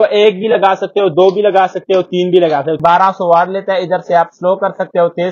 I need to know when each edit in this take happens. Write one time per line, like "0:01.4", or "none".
0:02.8